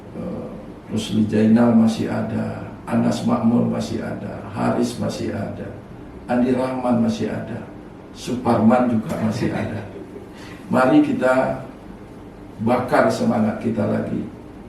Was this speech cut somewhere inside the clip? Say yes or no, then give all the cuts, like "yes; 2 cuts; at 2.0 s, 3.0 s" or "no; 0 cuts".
no; 0 cuts